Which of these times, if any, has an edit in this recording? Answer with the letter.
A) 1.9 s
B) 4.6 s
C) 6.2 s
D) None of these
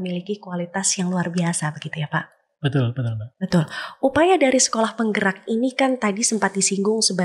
D